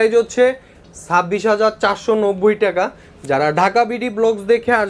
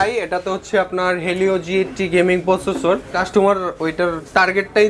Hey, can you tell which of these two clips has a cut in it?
second; 1 cut; at 3.2 s

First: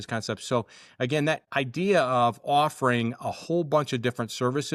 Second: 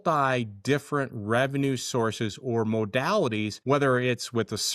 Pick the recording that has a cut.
second; 1 cut; at 3.5 s

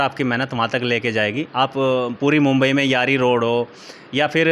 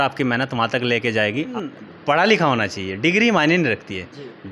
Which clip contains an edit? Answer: second; 1 cut; at 1.6 s

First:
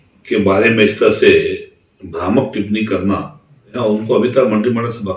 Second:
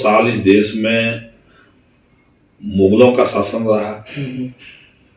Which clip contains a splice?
first; 1 cut; at 3.7 s

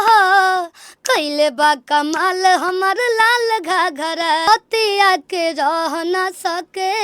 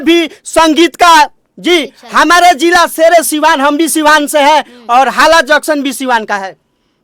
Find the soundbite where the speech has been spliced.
first; 1 cut; at 4.5 s

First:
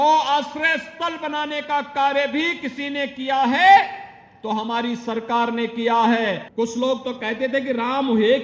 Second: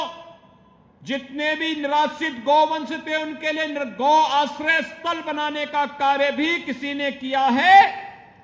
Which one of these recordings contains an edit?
first; 1 cut; at 6.5 s

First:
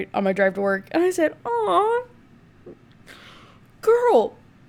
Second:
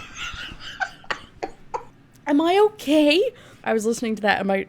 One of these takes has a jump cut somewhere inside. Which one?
second; 1 cut; at 3.5 s

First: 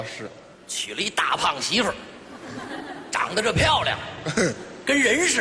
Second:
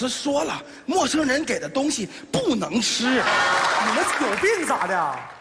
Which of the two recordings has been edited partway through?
second; 1 cut; at 3.6 s

